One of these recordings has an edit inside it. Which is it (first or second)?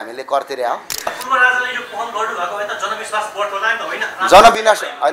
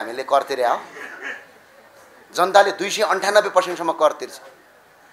first